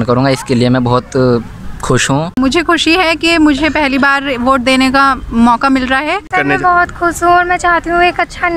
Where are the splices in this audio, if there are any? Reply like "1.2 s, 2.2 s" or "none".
2.4 s, 6.3 s